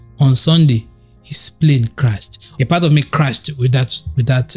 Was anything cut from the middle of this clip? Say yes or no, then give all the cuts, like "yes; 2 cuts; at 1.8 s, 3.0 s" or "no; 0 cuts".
yes; 1 cut; at 2.4 s